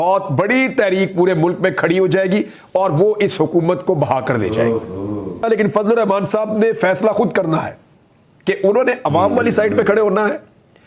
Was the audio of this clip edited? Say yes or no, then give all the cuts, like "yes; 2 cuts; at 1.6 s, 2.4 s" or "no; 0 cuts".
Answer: yes; 1 cut; at 5.4 s